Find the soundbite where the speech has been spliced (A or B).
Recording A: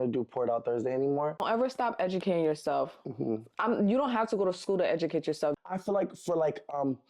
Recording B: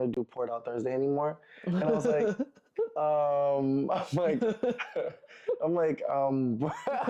A